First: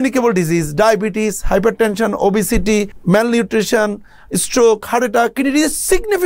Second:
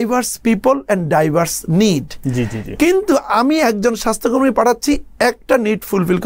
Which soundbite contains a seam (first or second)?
first